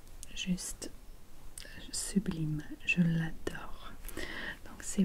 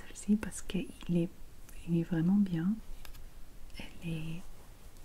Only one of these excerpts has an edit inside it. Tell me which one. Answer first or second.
second